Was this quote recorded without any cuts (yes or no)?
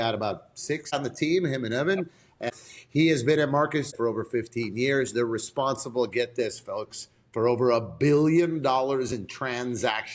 no